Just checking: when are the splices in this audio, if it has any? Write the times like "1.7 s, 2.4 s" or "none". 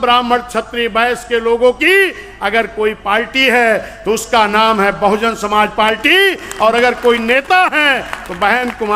none